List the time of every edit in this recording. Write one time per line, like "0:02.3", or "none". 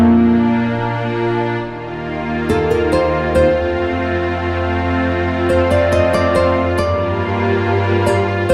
0:04.8